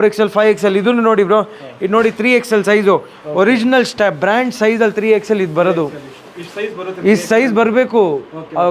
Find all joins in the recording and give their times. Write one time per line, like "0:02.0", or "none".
none